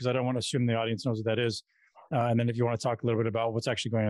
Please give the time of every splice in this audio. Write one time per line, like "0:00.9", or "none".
none